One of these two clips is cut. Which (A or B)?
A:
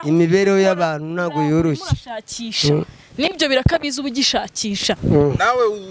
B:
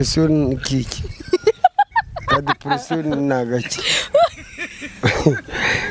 A